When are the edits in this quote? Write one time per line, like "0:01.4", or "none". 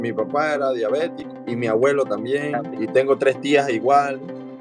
0:01.2
0:02.7